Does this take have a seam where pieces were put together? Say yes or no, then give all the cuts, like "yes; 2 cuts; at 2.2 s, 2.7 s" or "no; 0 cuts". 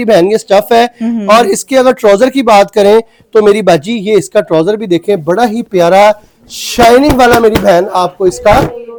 no; 0 cuts